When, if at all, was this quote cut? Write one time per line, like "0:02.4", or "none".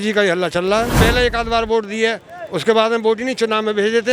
0:01.0

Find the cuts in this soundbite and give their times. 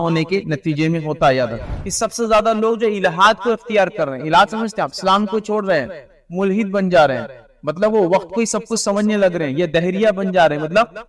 0:01.7

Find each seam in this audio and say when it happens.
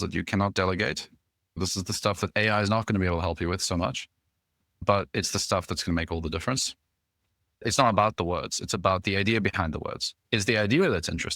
0:01.6
0:07.6

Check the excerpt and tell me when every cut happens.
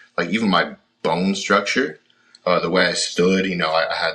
none

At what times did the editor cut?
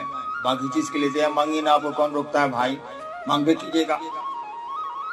0:04.0

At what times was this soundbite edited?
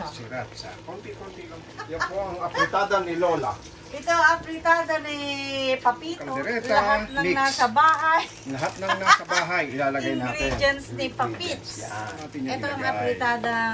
0:01.8
0:06.2
0:12.2

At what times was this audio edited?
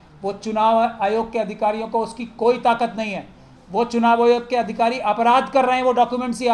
none

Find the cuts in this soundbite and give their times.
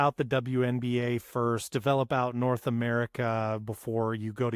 none

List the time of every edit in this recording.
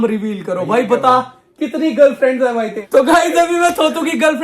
0:02.8

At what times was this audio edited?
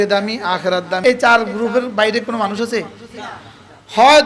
0:01.0

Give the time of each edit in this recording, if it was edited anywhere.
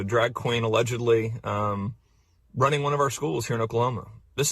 0:02.1

